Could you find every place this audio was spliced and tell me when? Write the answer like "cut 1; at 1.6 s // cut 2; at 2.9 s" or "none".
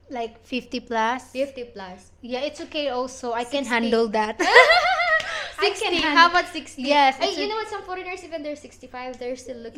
none